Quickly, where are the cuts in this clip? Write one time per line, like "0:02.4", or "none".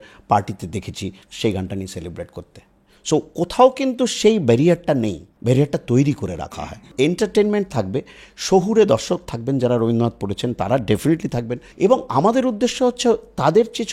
0:01.2
0:05.3
0:06.4
0:11.6